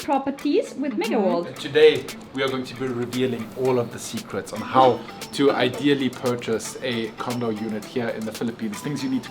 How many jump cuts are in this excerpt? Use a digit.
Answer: 1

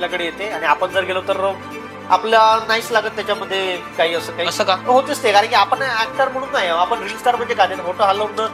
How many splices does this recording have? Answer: 1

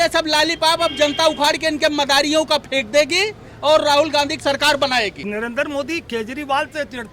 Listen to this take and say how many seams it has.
1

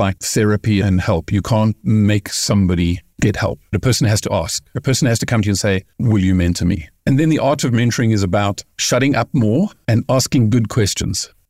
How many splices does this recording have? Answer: 3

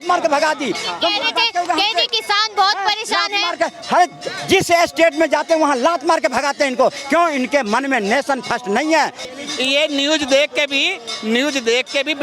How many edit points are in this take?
1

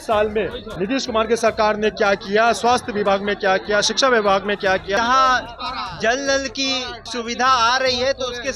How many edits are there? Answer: 2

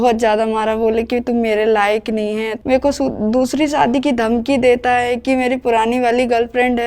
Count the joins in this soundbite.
1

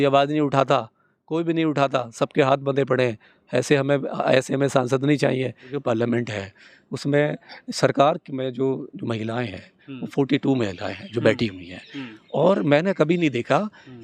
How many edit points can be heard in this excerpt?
1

